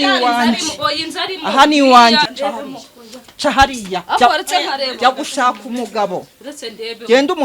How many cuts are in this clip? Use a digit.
1